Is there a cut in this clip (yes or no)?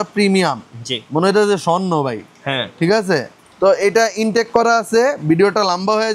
no